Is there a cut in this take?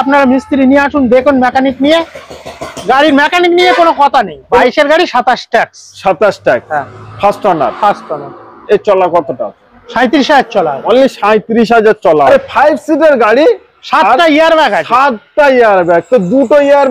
yes; 2 cuts; at 4.6 s, 12.3 s

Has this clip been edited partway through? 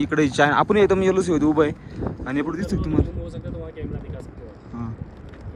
no; 0 cuts

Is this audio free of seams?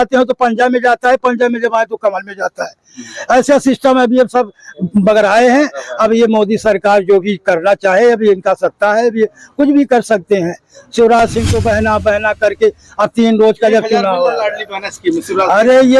yes; 0 cuts

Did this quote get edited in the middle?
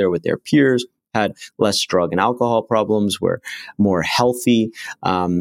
no; 0 cuts

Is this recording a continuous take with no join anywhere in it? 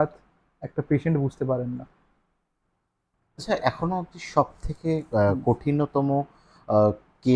no; 1 cut; at 3.3 s

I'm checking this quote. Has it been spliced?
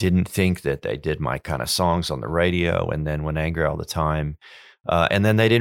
no; 0 cuts

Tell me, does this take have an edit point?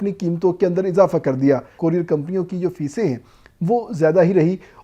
yes; 1 cut; at 1.7 s

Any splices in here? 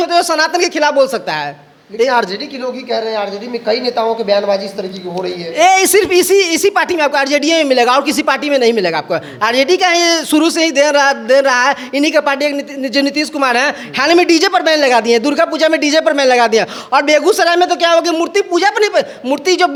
no; 0 cuts

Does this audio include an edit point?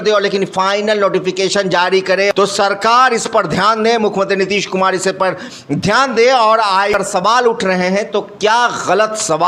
yes; 2 cuts; at 2.3 s, 6.9 s

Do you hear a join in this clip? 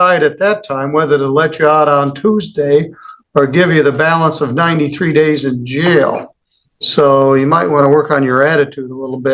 no; 0 cuts

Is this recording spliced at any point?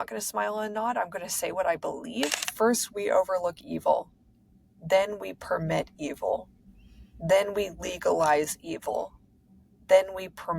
yes; 1 cut; at 2.5 s

